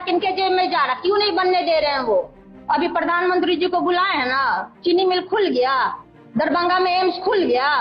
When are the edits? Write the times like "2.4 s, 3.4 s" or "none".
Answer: 2.6 s